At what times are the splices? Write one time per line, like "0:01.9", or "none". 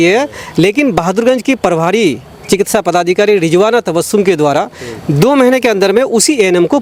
none